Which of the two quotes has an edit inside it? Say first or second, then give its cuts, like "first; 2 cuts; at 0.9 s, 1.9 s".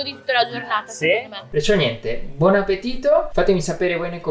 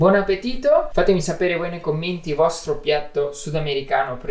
first; 1 cut; at 1.5 s